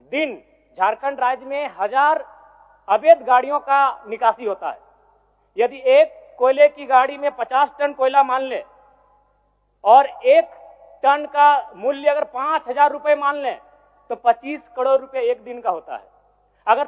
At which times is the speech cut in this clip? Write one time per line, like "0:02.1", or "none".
none